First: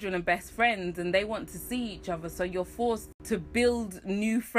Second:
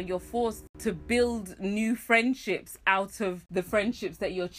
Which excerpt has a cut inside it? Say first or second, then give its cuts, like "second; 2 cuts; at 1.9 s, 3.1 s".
second; 1 cut; at 3.4 s